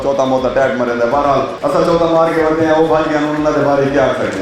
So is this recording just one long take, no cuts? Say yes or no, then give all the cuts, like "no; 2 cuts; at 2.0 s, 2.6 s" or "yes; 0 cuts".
no; 1 cut; at 1.5 s